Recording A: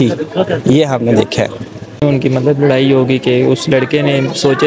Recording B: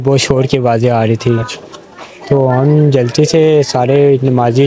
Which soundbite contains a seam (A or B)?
A